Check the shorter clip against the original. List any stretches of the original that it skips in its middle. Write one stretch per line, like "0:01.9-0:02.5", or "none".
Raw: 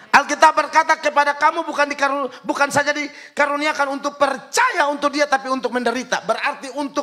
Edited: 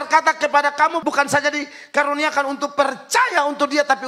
0:01.6-0:02.4